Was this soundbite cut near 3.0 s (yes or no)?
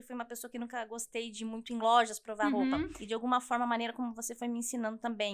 yes